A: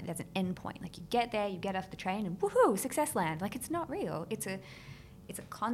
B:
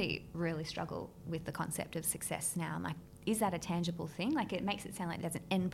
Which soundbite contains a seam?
B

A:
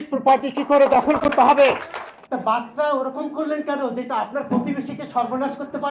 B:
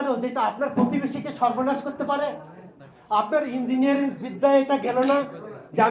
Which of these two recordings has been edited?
A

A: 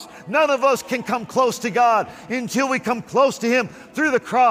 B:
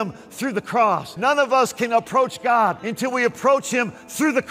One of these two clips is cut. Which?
B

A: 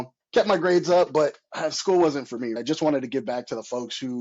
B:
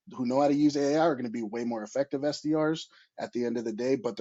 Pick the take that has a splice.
A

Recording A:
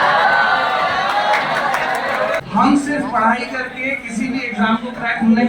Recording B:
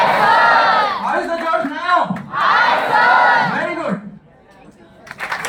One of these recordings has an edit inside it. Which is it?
A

